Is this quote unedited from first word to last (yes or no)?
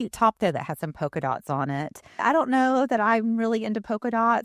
no